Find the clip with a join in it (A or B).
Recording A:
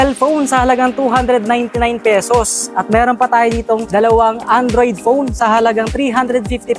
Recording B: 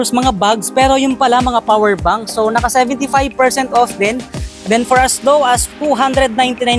A